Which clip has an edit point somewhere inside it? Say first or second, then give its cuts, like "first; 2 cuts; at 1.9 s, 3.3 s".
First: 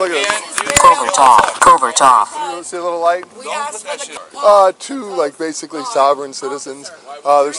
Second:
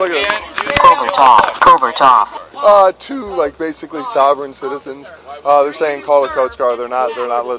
second; 1 cut; at 2.4 s